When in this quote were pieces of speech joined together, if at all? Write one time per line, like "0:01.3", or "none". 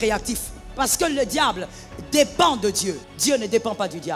0:03.1